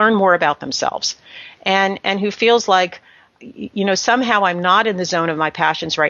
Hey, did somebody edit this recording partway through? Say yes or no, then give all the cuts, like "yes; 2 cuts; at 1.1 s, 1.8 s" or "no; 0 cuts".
no; 0 cuts